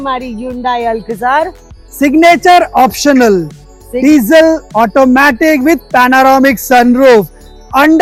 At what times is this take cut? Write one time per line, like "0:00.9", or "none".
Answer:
none